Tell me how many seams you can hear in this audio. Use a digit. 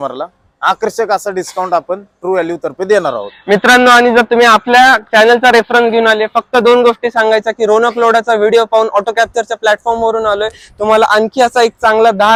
0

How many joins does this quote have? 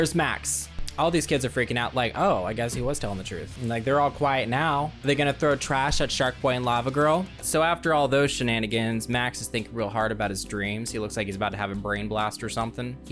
1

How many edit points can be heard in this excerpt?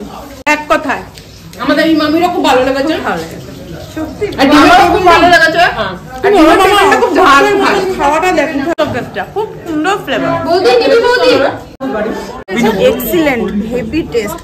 2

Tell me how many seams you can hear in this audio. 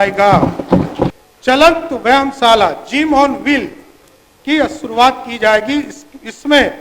1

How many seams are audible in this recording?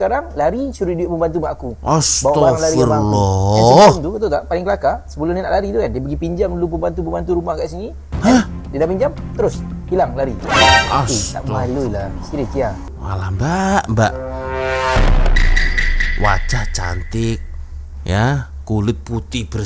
1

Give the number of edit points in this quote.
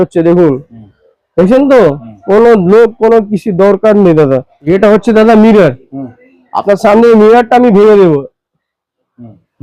1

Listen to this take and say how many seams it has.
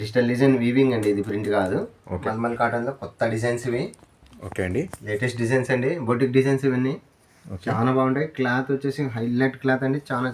1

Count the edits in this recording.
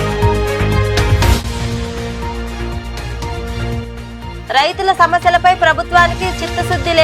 1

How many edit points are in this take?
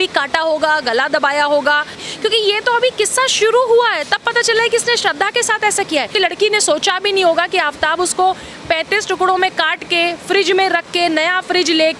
2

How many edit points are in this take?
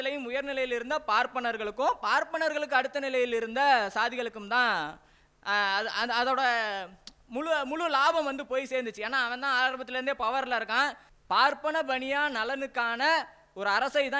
1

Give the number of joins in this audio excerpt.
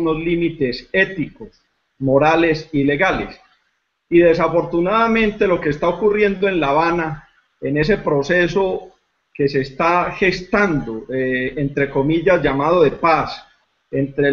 0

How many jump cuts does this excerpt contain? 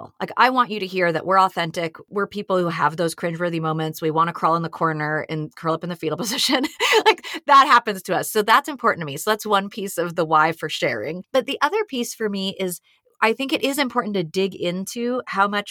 2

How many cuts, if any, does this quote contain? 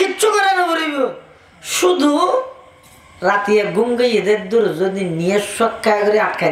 0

